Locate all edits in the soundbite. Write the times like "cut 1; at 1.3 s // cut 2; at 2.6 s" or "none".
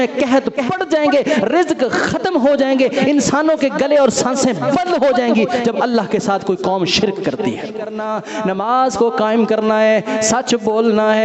cut 1; at 8.0 s